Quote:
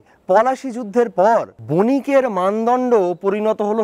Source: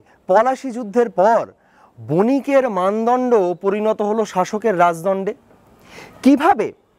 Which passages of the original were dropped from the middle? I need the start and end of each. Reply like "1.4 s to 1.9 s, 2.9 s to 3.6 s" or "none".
1.6 s to 2.0 s